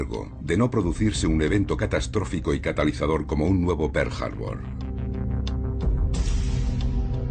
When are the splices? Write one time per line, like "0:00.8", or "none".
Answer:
none